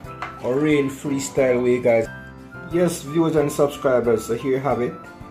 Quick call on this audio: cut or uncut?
cut